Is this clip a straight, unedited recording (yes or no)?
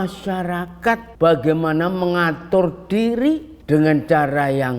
no